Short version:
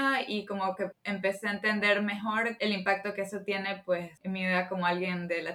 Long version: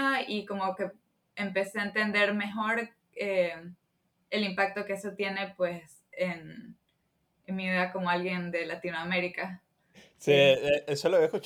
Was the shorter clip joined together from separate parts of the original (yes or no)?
yes